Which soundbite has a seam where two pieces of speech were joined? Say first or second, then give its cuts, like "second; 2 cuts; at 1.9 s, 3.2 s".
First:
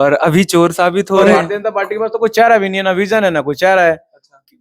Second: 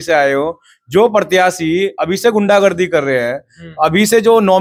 first; 1 cut; at 1.2 s